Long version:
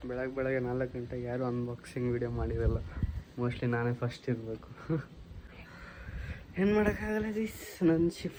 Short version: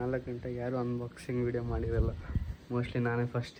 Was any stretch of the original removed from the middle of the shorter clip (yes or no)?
no